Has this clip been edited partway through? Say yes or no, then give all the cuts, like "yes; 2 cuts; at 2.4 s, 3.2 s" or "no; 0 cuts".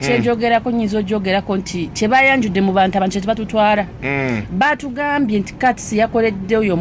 no; 0 cuts